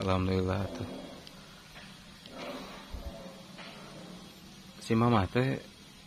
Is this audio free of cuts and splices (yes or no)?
yes